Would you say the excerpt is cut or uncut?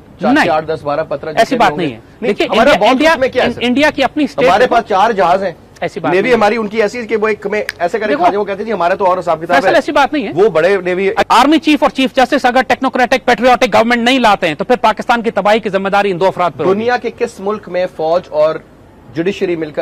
cut